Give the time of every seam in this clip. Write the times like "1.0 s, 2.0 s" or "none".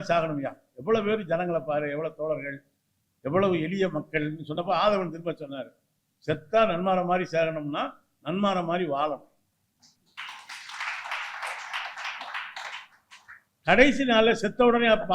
none

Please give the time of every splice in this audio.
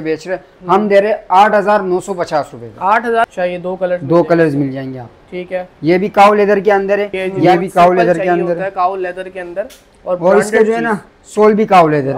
3.3 s, 7.6 s

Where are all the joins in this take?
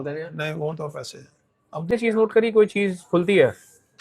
1.9 s

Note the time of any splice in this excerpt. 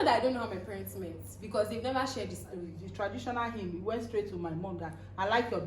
2.8 s

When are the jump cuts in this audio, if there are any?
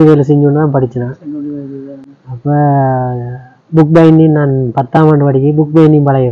none

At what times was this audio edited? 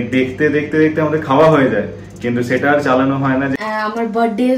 3.6 s

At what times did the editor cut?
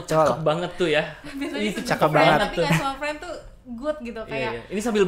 none

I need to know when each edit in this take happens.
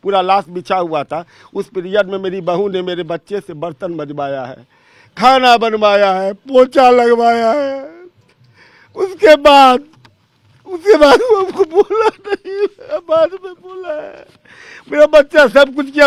none

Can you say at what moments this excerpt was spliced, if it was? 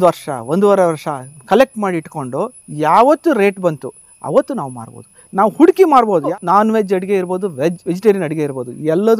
6.3 s

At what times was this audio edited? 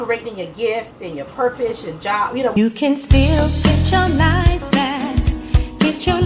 2.5 s

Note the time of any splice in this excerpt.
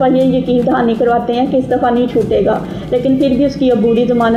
none

